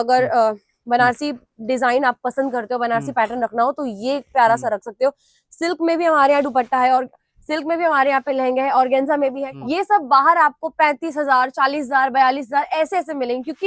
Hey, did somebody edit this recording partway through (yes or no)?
yes